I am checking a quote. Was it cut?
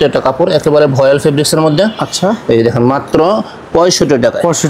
no; 0 cuts

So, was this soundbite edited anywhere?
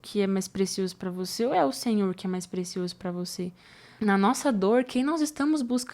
yes; 1 cut; at 3.8 s

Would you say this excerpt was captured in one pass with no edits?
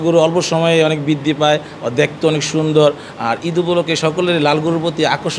yes; 0 cuts

